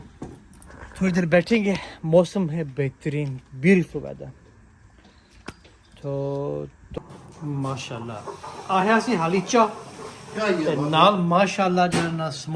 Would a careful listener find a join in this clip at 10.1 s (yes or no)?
no